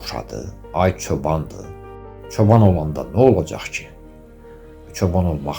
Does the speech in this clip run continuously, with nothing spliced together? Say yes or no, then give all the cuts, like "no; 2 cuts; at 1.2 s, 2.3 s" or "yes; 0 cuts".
no; 1 cut; at 1.9 s